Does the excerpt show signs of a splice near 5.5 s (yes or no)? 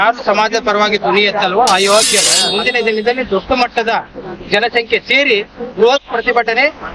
no